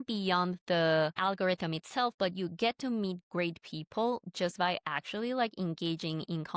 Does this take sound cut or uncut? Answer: cut